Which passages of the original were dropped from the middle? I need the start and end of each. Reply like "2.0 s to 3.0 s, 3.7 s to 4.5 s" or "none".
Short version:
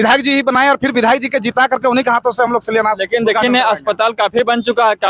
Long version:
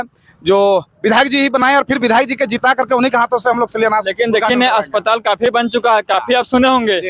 none